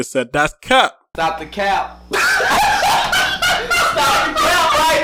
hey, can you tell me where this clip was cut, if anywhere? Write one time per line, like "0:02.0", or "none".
none